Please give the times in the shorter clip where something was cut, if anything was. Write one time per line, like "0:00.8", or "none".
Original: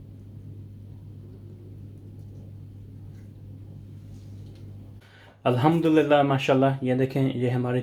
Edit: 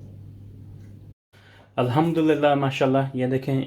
0:01.2

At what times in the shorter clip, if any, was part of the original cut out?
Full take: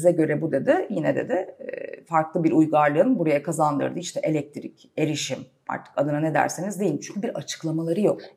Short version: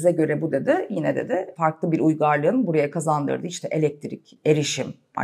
0:01.5

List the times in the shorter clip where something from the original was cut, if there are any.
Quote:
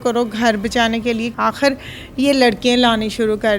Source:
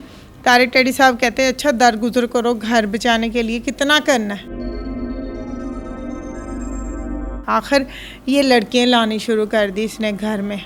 0:01.3

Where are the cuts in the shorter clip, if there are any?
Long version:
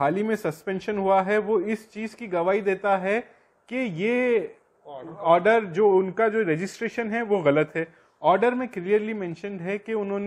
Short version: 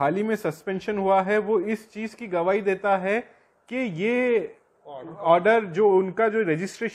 none

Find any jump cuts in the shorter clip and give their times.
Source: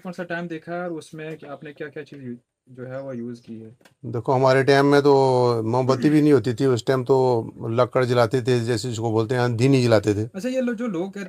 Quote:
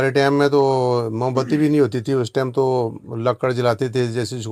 none

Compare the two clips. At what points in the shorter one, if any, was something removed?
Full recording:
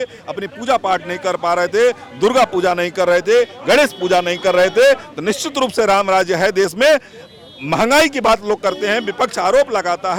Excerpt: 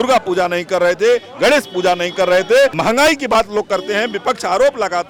0:02.8

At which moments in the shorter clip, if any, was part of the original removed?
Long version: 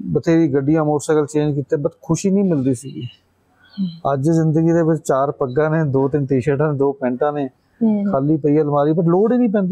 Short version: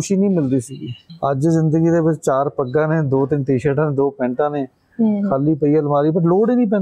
0:01.1

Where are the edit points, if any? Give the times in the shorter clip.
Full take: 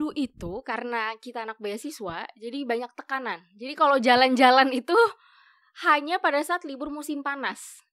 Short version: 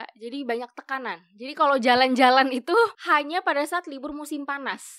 0:03.0

